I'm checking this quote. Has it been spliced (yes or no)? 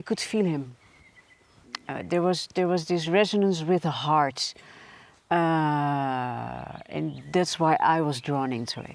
no